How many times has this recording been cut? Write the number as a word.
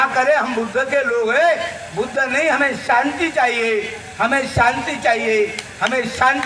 zero